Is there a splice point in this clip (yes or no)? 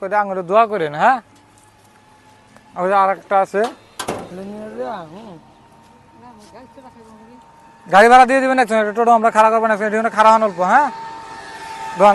yes